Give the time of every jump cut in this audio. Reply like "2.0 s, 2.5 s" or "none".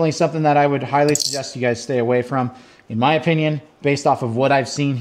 none